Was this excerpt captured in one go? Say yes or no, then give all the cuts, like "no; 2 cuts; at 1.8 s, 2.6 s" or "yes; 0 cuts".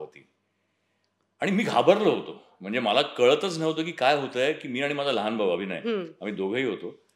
yes; 0 cuts